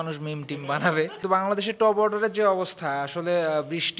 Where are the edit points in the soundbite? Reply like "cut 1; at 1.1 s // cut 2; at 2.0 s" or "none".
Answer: cut 1; at 1.2 s